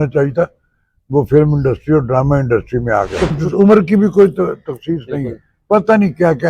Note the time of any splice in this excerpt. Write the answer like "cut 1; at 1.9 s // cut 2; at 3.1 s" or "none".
cut 1; at 3.4 s

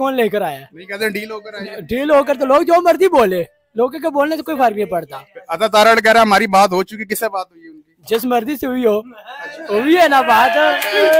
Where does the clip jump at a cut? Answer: none

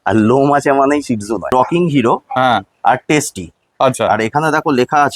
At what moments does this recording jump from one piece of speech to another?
cut 1; at 1.5 s

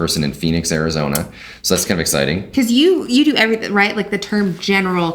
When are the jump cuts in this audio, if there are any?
cut 1; at 2.5 s

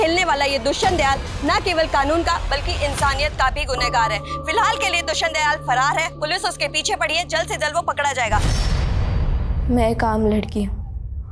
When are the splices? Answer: cut 1; at 8.5 s

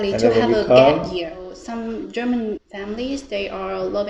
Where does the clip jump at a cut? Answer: cut 1; at 1.5 s

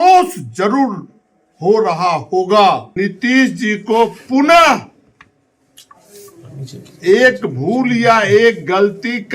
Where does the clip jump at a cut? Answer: cut 1; at 3.0 s

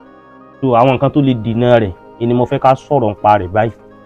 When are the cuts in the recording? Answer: none

